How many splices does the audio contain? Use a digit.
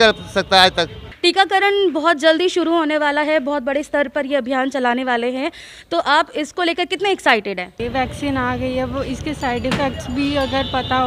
2